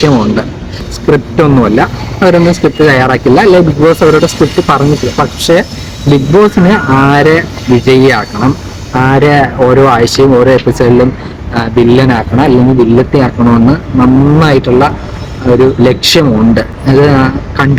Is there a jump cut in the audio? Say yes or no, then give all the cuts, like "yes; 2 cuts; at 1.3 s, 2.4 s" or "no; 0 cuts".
no; 0 cuts